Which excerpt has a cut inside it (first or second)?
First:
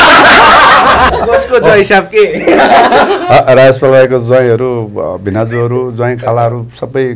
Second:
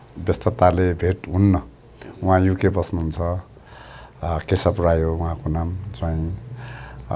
first